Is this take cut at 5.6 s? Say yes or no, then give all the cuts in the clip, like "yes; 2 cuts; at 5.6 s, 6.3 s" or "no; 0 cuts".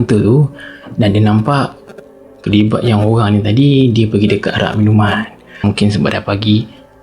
yes; 1 cut; at 5.6 s